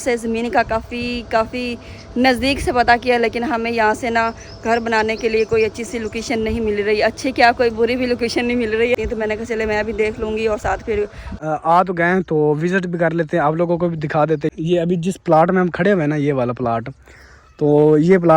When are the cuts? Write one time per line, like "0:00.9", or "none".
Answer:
0:09.0
0:11.3
0:14.5